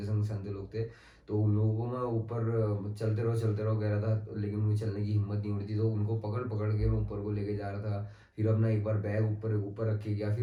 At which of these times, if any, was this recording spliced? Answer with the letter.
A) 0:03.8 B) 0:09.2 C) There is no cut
C